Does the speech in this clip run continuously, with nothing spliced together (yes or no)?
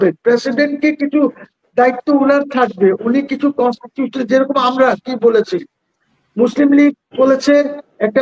yes